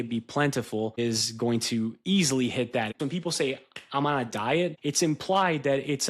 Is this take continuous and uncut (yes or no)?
no